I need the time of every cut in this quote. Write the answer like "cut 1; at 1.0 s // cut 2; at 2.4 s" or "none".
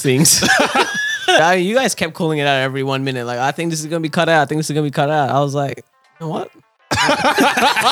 cut 1; at 1.4 s